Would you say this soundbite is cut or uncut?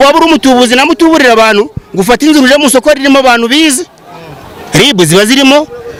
uncut